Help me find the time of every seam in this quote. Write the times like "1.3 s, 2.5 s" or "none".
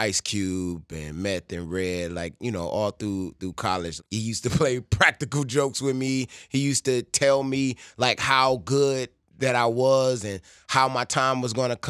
4.0 s